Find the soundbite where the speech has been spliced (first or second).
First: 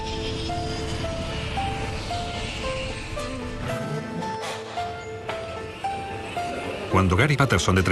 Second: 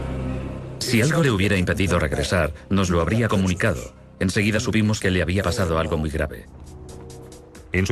second